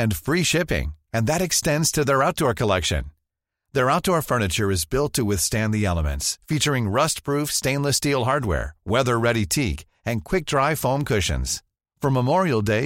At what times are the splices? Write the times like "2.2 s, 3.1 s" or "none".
none